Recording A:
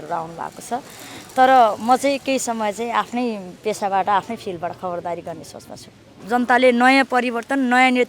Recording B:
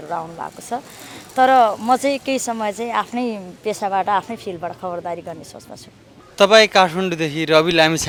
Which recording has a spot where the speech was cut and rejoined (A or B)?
A